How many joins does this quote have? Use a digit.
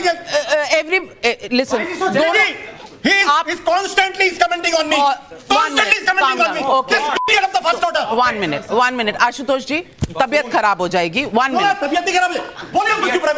0